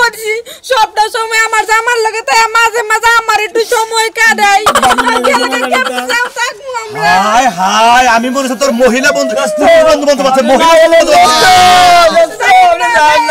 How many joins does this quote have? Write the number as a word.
zero